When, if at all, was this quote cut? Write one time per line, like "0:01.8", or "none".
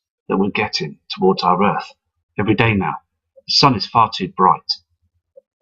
0:02.9